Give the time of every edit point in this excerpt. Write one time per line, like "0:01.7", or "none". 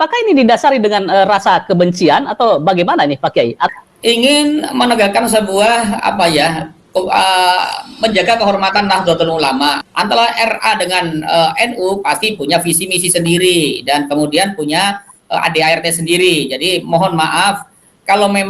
0:03.7
0:09.8